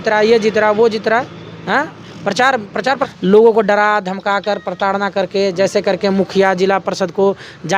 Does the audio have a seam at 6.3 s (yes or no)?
no